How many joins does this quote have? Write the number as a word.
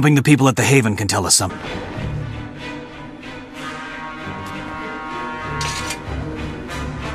zero